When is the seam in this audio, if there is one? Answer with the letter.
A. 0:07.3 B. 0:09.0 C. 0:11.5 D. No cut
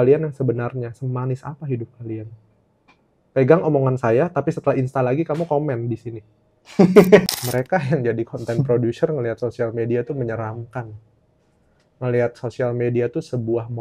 A